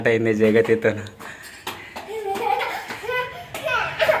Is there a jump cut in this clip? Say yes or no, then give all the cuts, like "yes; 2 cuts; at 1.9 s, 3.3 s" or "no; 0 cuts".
no; 0 cuts